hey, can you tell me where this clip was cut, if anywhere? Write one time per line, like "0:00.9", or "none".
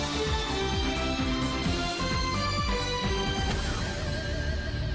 none